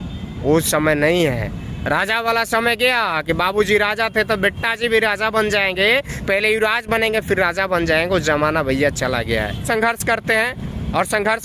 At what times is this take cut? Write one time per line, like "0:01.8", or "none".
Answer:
0:09.6